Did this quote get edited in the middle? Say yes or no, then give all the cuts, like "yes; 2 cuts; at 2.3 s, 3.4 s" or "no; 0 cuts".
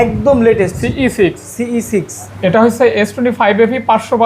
yes; 1 cut; at 2.2 s